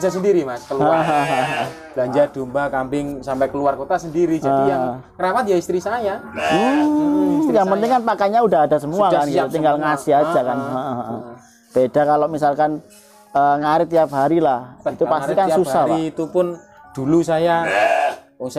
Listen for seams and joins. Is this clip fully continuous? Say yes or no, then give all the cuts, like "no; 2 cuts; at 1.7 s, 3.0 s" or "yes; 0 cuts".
yes; 0 cuts